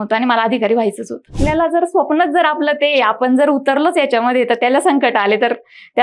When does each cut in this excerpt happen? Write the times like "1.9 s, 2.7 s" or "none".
1.4 s